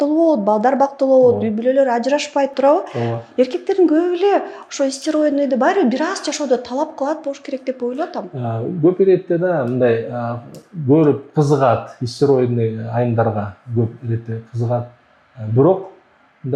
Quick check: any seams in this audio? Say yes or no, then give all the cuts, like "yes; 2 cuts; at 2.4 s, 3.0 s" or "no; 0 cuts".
no; 0 cuts